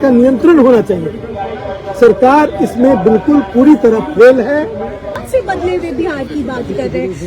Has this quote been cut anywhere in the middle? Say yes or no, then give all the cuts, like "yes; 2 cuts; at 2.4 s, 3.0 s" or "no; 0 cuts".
yes; 1 cut; at 5.1 s